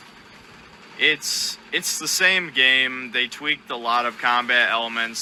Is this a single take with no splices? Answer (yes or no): yes